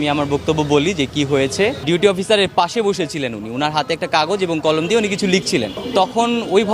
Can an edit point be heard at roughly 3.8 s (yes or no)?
no